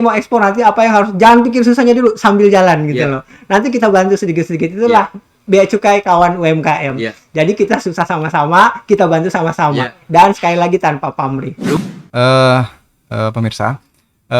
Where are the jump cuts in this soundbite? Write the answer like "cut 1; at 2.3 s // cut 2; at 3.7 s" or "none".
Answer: cut 1; at 11.8 s